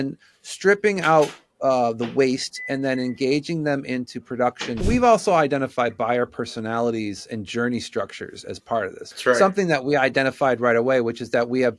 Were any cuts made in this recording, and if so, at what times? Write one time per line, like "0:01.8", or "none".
0:04.8
0:09.0